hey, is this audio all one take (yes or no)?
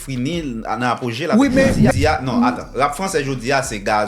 no